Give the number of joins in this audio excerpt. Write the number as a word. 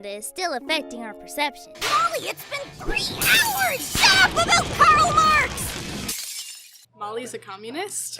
one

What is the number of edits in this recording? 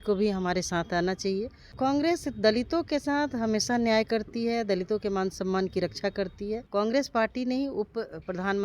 two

